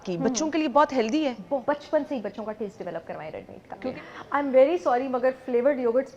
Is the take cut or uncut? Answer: cut